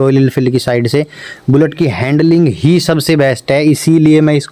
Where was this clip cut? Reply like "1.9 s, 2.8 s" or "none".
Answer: none